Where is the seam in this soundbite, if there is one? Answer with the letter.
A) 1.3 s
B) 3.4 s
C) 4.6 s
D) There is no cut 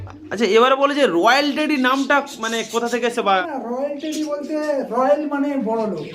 B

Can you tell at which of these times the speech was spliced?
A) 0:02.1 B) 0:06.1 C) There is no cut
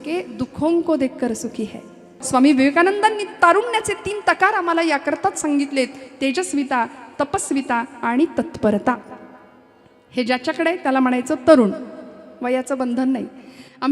A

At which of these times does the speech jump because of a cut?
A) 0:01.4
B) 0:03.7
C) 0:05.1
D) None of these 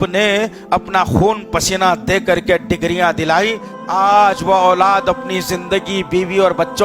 B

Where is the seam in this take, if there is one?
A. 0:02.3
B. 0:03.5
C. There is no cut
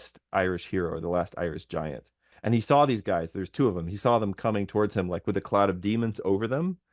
A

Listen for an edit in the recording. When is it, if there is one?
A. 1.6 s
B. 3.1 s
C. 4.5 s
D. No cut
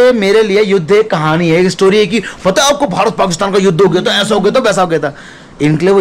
D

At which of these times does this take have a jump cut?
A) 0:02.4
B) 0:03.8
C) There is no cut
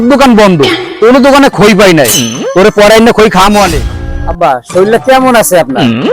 B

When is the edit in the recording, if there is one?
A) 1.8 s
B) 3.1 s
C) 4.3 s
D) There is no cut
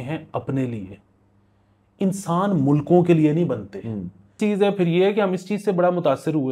C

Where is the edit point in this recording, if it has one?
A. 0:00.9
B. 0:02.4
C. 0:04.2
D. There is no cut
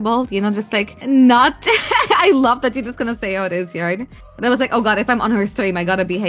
A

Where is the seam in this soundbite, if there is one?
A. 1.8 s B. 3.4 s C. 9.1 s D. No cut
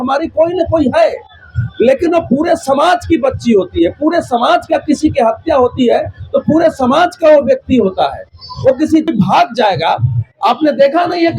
C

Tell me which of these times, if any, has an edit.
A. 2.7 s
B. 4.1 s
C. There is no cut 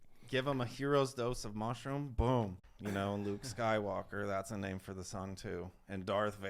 A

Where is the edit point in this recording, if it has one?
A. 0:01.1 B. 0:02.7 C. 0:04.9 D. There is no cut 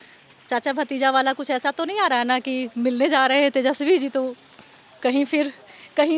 D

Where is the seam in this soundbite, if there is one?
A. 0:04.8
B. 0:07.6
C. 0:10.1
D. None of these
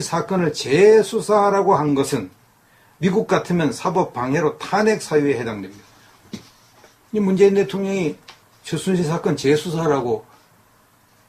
A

